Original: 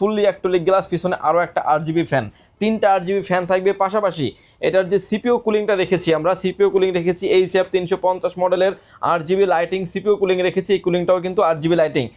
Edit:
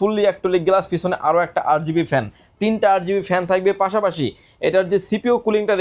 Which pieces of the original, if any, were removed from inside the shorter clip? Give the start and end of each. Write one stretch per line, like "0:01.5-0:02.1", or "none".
none